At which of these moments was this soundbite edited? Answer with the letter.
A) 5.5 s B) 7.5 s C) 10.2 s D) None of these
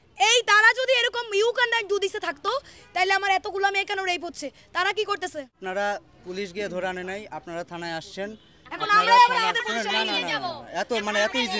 A